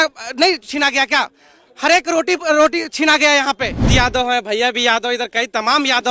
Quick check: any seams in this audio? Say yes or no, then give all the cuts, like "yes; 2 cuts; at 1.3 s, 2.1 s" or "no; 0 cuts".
yes; 1 cut; at 3.9 s